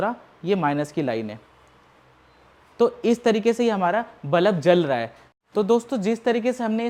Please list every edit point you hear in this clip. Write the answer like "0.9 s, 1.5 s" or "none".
none